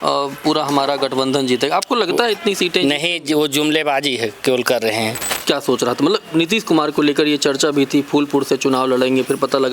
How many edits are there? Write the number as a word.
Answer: one